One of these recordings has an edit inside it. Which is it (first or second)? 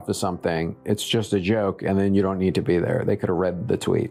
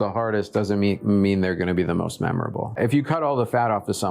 second